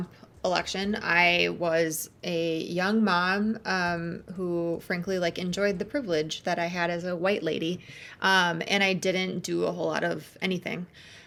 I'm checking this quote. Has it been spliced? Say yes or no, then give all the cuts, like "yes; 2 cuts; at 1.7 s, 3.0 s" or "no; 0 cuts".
no; 0 cuts